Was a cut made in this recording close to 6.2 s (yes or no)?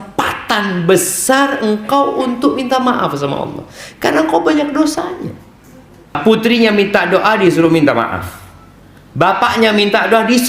yes